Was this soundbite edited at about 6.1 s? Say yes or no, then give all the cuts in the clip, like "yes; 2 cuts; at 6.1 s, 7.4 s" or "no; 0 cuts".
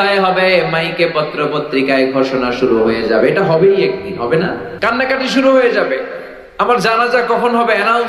no; 1 cut; at 4.7 s